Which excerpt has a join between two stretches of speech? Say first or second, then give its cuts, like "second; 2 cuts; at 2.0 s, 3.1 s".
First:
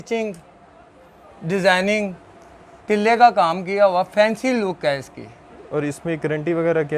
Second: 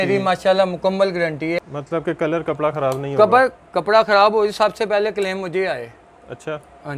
second; 1 cut; at 1.6 s